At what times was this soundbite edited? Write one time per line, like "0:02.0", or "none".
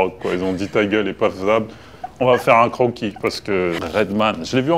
0:03.8